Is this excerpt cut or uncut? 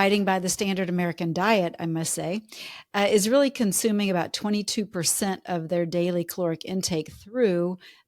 uncut